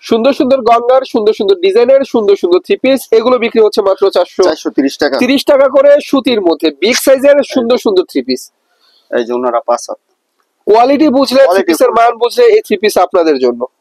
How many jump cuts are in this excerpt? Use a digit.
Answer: 0